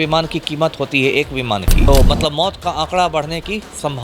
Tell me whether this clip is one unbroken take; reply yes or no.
no